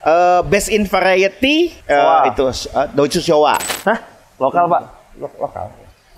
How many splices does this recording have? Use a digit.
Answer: 2